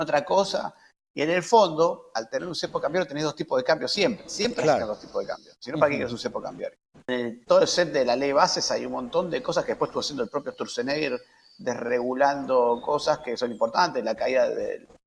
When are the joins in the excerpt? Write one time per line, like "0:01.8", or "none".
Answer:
0:07.1